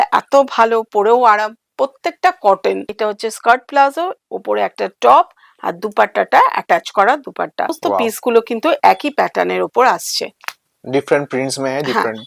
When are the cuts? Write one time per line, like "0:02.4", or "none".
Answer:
0:02.9
0:07.8

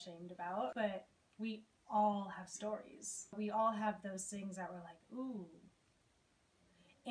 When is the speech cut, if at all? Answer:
0:00.7
0:03.3

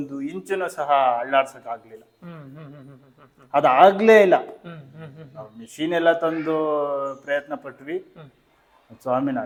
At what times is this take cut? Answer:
none

